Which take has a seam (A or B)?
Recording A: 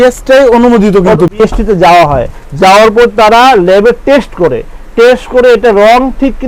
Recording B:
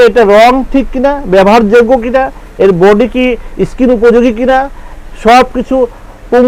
A